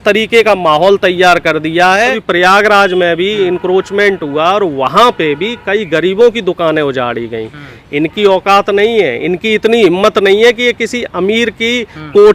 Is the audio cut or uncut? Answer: cut